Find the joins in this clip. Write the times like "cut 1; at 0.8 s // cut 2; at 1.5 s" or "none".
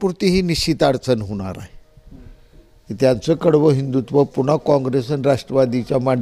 none